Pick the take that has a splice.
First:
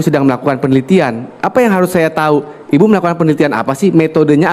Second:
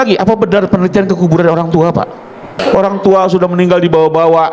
second; 1 cut; at 2.5 s

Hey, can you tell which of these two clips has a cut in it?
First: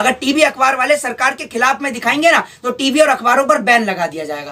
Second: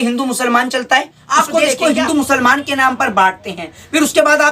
second; 1 cut; at 1.5 s

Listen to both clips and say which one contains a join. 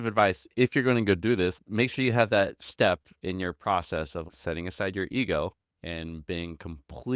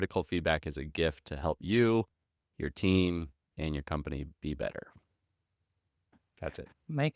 first; 2 cuts; at 1.6 s, 4.2 s

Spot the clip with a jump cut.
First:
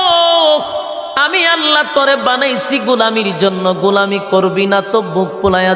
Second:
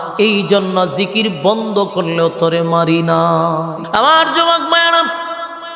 second; 1 cut; at 3.8 s

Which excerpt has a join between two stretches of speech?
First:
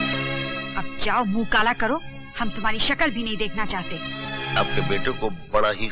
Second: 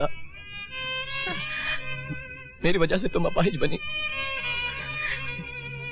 first; 1 cut; at 4.6 s

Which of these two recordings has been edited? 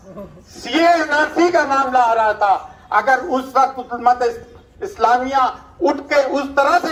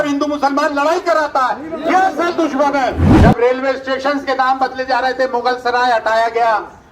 second; 1 cut; at 3.1 s

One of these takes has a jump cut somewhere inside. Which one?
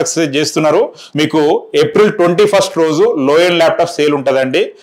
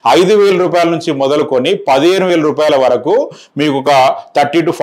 first; 1 cut; at 1.0 s

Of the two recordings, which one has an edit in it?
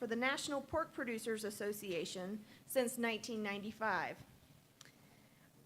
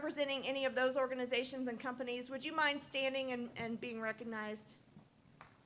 first; 1 cut; at 2.3 s

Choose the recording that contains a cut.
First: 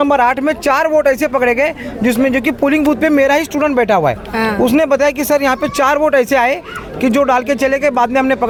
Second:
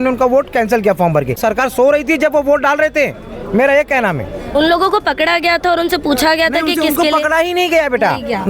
second; 1 cut; at 1.4 s

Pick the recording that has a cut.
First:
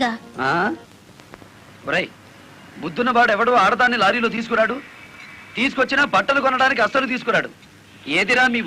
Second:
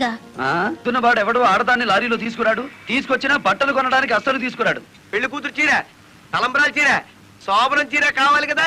second; 3 cuts; at 0.8 s, 2.7 s, 5.0 s

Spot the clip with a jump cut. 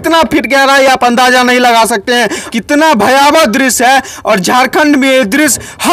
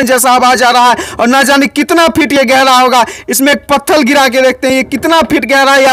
first; 1 cut; at 2.4 s

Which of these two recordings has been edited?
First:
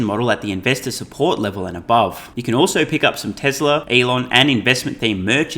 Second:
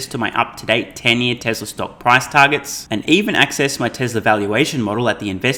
first; 2 cuts; at 2.3 s, 3.9 s

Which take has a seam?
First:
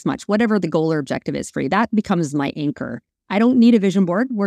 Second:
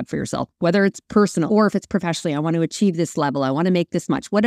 second; 1 cut; at 1.5 s

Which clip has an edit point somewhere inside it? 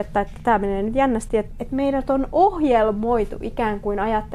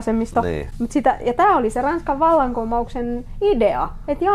first; 1 cut; at 1.5 s

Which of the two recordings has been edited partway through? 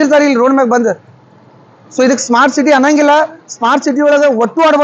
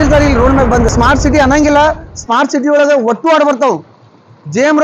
second; 1 cut; at 0.9 s

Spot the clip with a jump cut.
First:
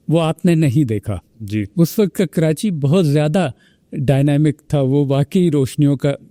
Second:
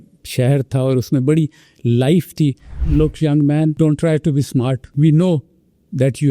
second; 3 cuts; at 2.7 s, 3.7 s, 4.9 s

